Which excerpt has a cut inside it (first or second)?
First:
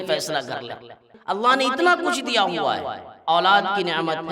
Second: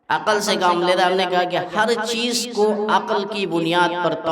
first